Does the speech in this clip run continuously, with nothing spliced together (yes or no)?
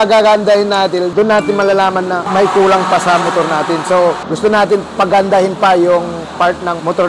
no